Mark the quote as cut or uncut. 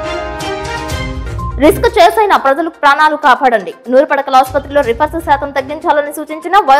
uncut